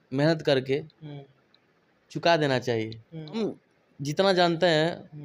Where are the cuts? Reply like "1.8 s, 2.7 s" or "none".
3.4 s